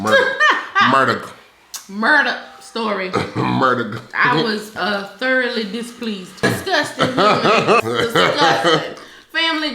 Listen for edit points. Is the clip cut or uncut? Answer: cut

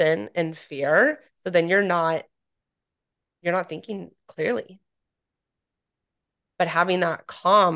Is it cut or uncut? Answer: uncut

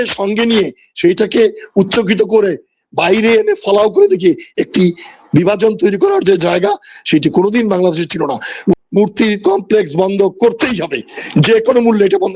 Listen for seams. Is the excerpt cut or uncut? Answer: cut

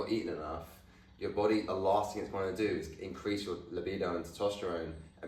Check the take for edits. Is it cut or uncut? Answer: uncut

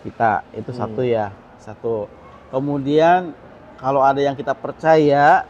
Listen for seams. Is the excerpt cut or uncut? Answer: uncut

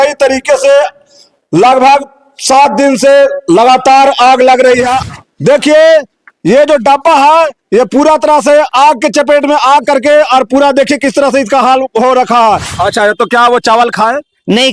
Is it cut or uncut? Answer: cut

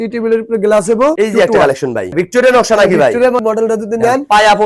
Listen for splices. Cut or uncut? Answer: cut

